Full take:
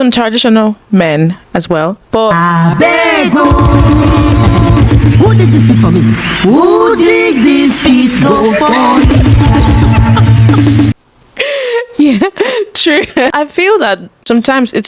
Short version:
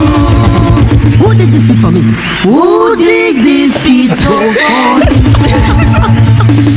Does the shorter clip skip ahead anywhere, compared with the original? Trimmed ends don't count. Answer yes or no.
no